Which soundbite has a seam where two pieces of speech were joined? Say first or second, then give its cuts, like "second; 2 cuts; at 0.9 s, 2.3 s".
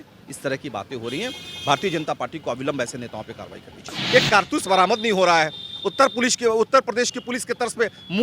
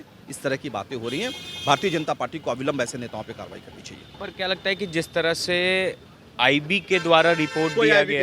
first; 1 cut; at 3.9 s